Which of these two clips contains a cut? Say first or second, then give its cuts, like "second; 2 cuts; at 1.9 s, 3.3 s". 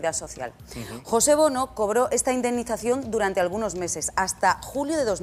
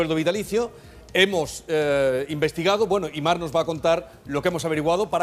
second; 1 cut; at 1.8 s